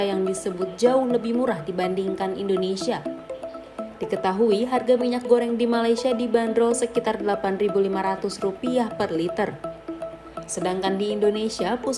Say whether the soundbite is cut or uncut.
uncut